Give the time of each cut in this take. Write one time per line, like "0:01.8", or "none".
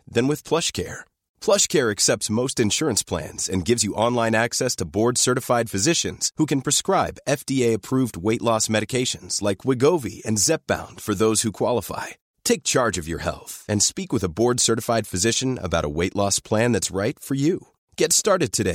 none